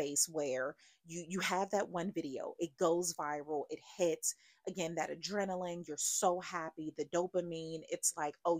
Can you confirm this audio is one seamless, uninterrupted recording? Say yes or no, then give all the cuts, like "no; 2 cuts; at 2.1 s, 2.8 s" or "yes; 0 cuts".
yes; 0 cuts